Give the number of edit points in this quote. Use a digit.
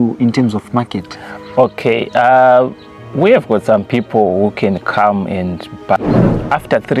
1